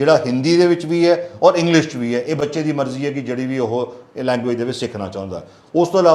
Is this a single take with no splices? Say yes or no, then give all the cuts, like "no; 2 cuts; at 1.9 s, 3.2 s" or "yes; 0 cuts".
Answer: yes; 0 cuts